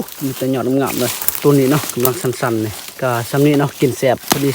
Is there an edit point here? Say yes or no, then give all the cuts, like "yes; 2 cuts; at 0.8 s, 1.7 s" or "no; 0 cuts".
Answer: yes; 2 cuts; at 1.2 s, 2.8 s